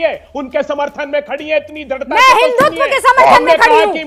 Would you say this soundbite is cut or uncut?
uncut